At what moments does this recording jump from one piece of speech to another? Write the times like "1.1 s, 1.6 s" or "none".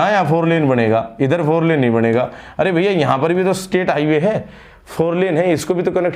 none